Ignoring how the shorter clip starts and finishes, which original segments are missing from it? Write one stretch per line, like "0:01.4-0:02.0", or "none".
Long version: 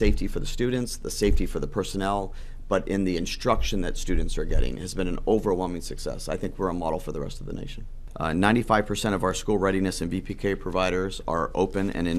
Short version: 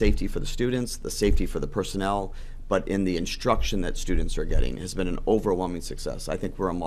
none